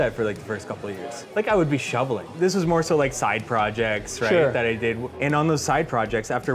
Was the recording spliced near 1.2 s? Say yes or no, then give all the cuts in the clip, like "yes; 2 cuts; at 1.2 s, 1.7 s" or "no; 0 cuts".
yes; 3 cuts; at 1.2 s, 2.3 s, 5.1 s